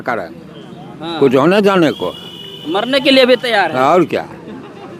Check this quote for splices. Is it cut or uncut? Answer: uncut